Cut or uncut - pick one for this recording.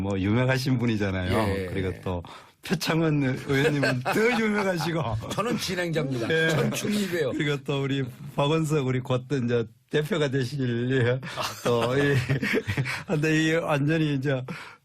cut